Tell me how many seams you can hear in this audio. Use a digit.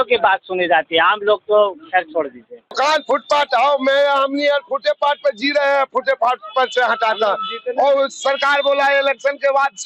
1